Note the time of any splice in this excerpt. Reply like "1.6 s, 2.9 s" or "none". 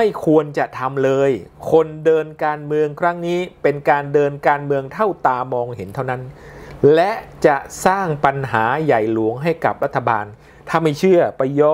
none